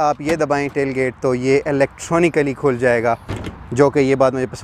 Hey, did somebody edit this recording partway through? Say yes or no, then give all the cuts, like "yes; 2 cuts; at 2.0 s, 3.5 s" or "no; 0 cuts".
no; 0 cuts